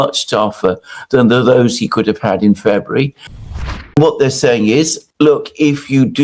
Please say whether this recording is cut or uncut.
cut